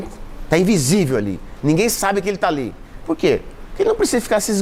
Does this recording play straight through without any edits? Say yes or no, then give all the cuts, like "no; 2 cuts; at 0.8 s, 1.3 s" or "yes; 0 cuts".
yes; 0 cuts